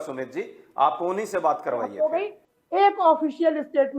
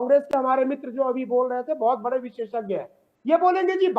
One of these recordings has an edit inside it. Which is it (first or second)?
first